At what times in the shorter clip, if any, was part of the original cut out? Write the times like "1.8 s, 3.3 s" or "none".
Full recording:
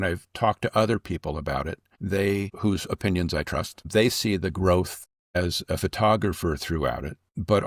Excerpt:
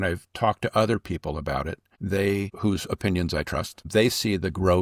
none